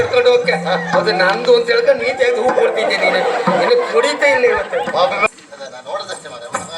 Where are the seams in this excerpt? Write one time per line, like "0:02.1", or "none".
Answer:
0:05.3